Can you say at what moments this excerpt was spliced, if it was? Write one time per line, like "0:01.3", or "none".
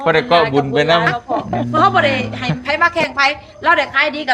0:01.7